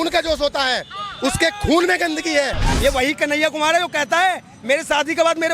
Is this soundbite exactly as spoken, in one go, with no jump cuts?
no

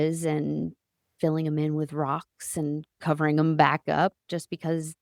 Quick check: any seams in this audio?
no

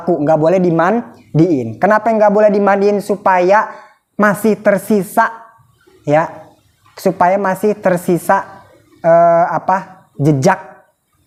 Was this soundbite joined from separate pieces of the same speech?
no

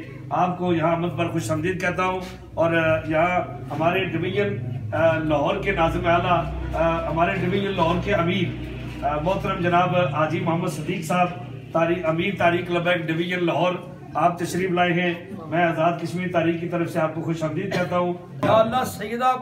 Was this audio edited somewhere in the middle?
yes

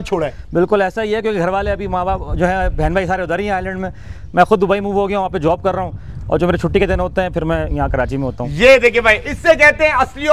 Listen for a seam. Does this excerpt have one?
no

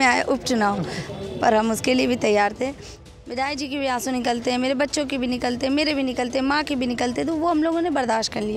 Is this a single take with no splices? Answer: no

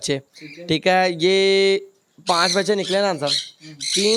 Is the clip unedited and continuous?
yes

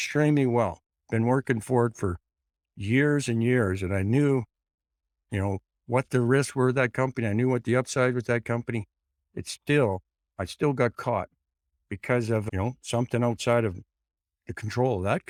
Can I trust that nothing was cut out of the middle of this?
yes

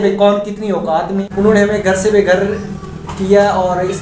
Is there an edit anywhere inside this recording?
yes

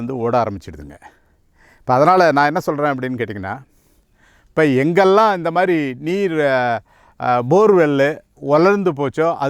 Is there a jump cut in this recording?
no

